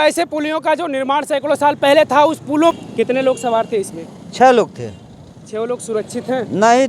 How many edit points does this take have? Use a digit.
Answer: 1